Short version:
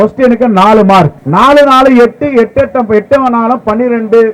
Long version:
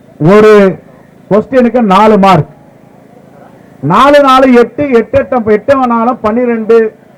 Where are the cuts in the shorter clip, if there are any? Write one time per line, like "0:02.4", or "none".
0:01.2